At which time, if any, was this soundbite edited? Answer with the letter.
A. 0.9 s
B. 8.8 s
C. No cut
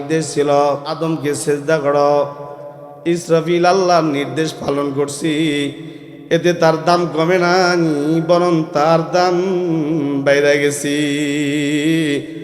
A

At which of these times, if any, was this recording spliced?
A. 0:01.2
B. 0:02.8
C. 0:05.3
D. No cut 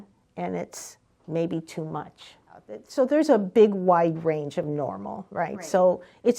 B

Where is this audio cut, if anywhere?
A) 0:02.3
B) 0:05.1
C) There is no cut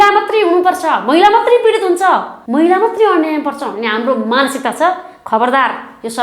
A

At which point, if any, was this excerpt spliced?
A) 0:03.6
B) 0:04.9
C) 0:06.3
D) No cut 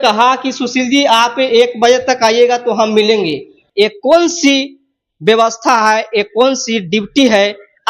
A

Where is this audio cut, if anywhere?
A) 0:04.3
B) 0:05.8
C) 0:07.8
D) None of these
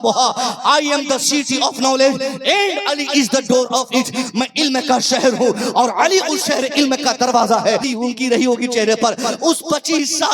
C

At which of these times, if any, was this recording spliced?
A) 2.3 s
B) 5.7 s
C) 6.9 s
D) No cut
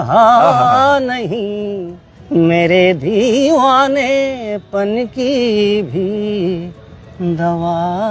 D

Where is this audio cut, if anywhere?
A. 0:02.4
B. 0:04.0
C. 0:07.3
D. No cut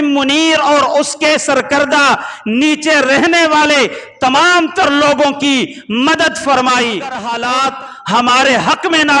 C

